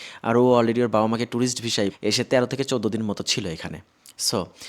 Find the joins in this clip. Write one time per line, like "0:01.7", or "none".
0:01.9